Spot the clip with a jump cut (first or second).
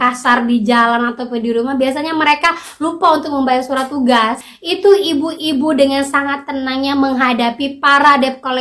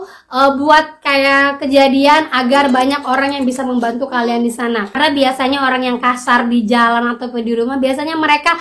first